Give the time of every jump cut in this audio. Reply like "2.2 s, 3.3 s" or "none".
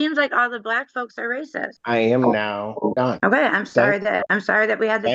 1.8 s, 3.1 s, 4.3 s